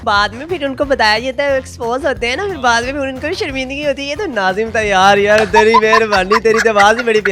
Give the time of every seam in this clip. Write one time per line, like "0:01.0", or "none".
none

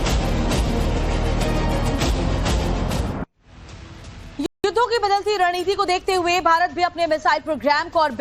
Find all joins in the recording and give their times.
0:03.0

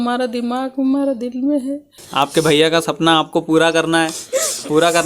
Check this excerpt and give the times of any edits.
0:01.9

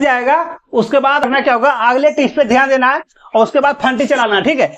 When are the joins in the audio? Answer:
0:01.2

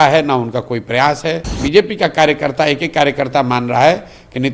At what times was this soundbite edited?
0:01.5

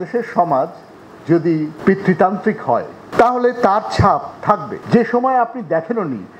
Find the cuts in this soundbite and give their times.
0:01.7
0:04.7

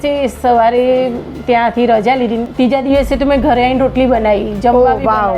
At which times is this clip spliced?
0:02.5

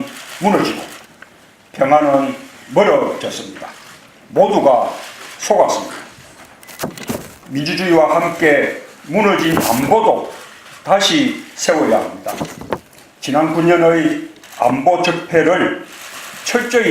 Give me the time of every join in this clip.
0:14.5

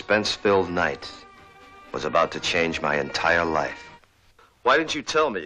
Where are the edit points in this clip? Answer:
0:02.9

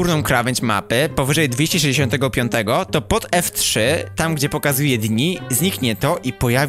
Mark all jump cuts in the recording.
none

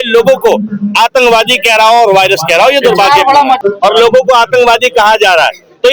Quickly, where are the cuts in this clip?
0:03.6

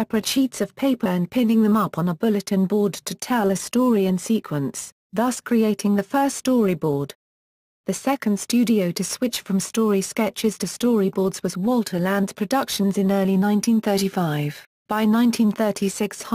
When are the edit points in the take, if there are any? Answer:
0:07.9

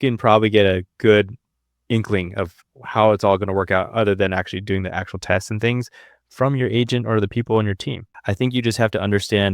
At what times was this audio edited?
0:08.1

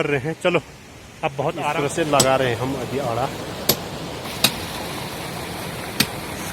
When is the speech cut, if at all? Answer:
0:01.7

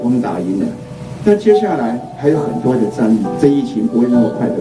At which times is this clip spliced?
0:03.3

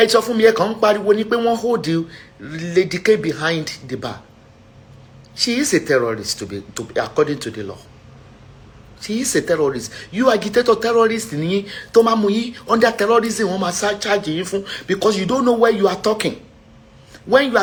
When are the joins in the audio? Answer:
none

